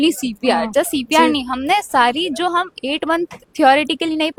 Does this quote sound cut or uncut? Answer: uncut